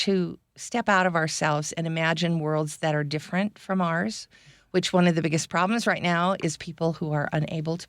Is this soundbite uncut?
yes; 0 cuts

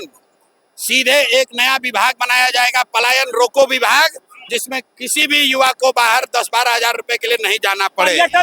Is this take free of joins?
yes; 0 cuts

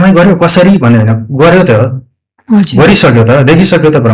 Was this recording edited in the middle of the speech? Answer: no; 0 cuts

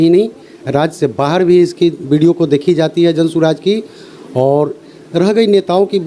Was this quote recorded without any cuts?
yes; 0 cuts

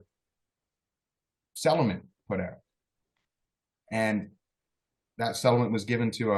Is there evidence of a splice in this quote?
no; 0 cuts

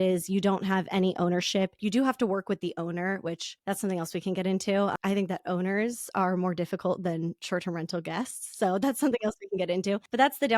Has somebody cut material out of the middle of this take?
yes; 1 cut; at 1.7 s

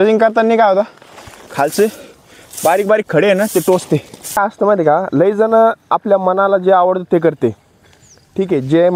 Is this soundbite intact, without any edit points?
no; 1 cut; at 4.4 s

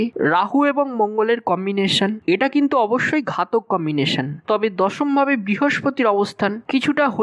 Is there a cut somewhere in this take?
no; 0 cuts

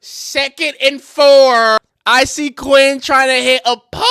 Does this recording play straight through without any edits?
no; 1 cut; at 1.9 s

